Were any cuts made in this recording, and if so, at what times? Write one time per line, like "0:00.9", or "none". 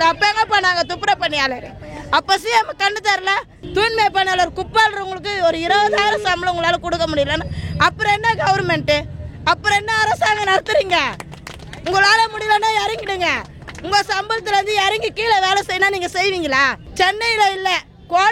0:03.5
0:16.8